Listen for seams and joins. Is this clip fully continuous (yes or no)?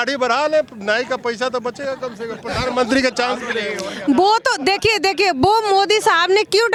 yes